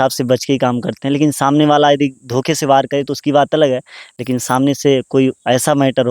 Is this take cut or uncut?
uncut